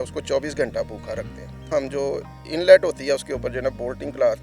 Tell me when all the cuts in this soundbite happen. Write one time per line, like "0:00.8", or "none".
0:01.7